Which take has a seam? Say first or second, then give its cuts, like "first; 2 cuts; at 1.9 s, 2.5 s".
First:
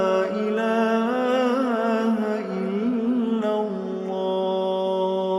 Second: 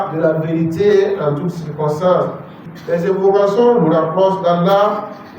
second; 1 cut; at 2.7 s